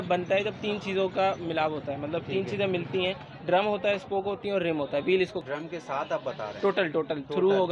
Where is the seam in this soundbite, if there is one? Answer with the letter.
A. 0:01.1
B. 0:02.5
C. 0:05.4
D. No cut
C